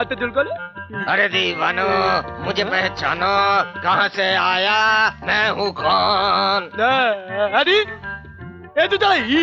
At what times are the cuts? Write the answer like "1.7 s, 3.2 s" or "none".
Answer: none